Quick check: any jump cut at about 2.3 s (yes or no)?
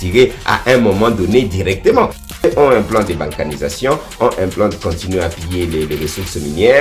yes